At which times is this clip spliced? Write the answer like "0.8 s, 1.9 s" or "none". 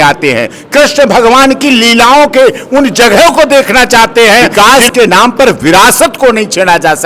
4.5 s